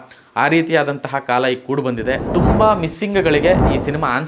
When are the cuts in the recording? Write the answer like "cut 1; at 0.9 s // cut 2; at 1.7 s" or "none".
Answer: cut 1; at 2.2 s